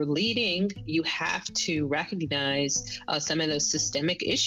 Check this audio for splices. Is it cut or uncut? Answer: uncut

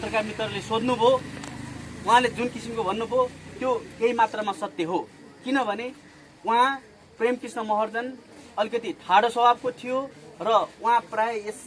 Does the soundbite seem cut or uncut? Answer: uncut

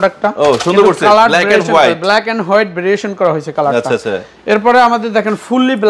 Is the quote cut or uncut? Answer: uncut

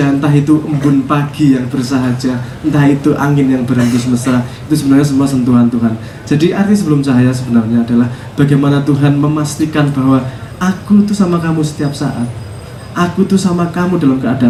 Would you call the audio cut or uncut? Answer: uncut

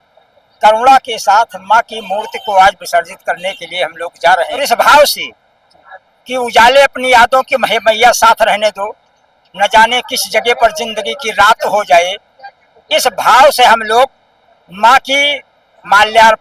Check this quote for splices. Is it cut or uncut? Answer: cut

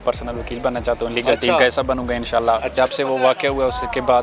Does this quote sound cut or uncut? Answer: cut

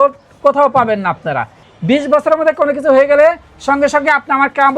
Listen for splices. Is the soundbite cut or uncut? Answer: cut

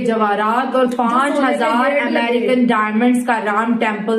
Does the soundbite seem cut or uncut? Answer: uncut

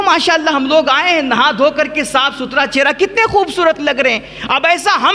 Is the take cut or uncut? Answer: uncut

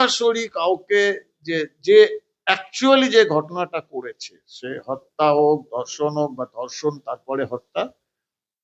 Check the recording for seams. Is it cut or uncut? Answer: uncut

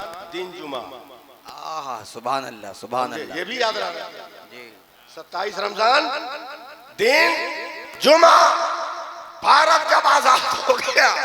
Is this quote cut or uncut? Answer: uncut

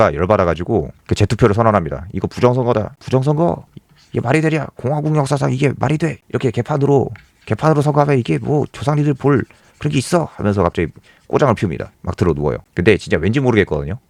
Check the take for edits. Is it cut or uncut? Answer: uncut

